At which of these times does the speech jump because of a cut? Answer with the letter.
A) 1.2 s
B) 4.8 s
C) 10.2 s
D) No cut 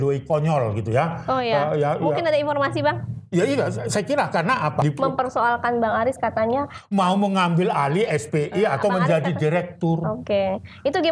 B